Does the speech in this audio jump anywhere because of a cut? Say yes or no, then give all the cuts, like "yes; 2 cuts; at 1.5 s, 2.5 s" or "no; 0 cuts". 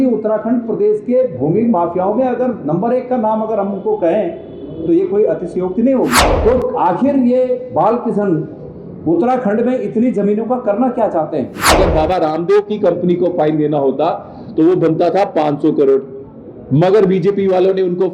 yes; 2 cuts; at 6.3 s, 11.7 s